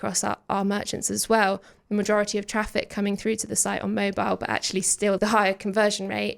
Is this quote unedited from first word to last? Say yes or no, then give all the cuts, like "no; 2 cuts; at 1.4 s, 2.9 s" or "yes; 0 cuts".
no; 1 cut; at 5.2 s